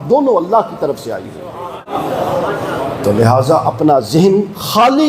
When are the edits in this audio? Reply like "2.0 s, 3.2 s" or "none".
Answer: 1.8 s